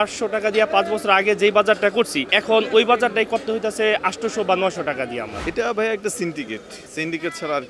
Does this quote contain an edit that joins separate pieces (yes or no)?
yes